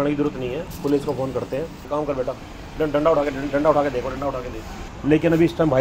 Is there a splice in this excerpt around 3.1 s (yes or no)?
no